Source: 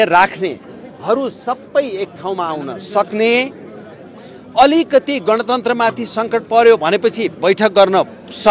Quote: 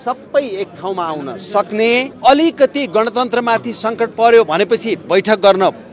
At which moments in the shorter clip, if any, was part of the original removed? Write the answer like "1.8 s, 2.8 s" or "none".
2.1 s